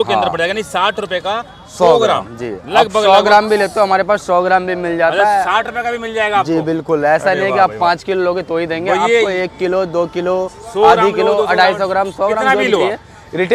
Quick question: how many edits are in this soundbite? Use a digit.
0